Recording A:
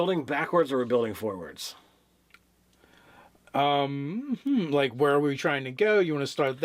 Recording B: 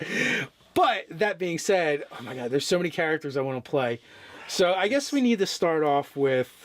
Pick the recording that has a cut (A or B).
B